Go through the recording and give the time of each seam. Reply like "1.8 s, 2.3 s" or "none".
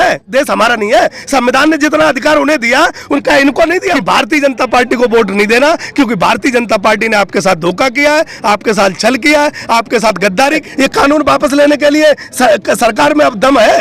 3.9 s, 10.6 s